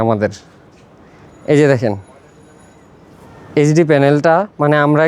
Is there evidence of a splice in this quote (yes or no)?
no